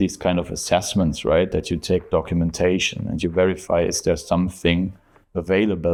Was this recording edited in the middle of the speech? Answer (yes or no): no